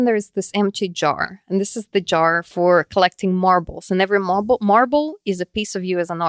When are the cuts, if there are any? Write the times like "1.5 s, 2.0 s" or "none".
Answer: 2.5 s